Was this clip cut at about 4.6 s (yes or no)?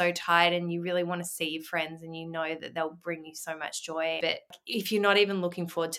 yes